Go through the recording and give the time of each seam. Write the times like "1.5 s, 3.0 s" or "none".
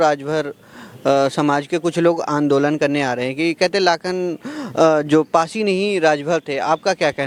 none

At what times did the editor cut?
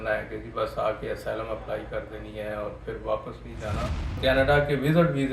4.2 s

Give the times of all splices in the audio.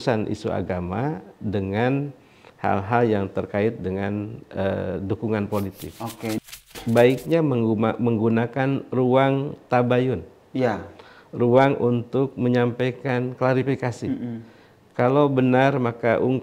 6.4 s

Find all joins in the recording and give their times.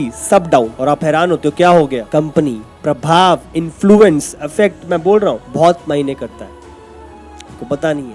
none

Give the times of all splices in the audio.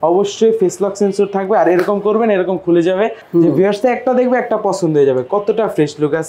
3.2 s

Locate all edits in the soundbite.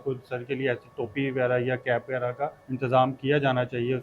2.6 s

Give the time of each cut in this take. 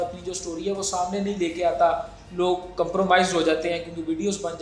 none

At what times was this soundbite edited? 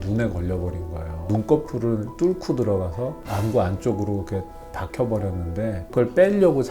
1.2 s, 3.2 s, 5.9 s

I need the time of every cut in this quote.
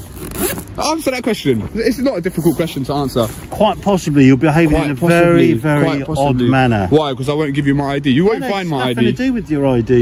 none

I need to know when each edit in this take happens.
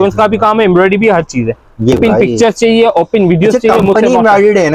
1.9 s

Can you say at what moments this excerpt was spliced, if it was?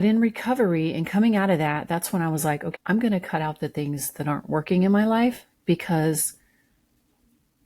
2.7 s

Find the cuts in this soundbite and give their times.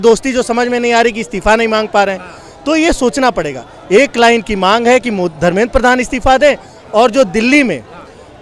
none

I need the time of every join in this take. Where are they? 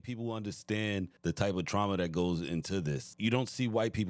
none

